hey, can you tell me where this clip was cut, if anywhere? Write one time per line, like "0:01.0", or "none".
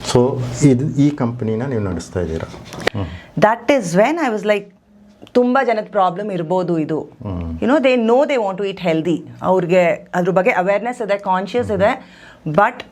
0:02.9